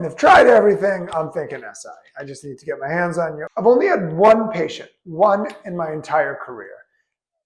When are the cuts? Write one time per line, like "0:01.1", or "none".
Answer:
0:03.4